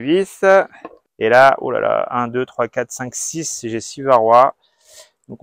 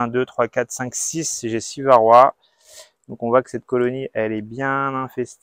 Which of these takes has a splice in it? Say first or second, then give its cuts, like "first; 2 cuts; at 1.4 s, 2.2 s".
first; 1 cut; at 1.1 s